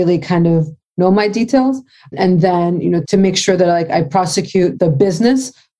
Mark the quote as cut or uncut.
cut